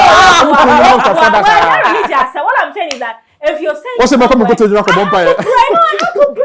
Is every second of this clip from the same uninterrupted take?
yes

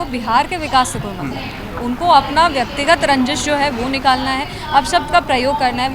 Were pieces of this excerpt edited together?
no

